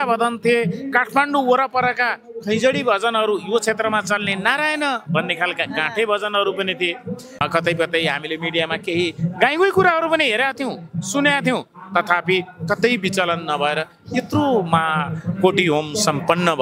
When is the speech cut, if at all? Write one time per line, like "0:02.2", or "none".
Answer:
0:07.2